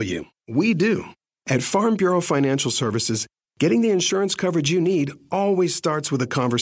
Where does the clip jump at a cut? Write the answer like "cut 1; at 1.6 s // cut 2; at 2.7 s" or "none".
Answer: cut 1; at 1.2 s